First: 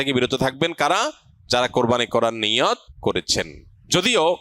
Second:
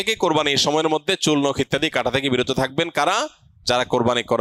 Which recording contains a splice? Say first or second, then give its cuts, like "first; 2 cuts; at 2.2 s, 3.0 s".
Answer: first; 1 cut; at 3.2 s